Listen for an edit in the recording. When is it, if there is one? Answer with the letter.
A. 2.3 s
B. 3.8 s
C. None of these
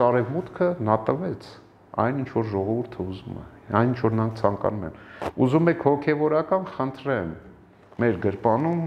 C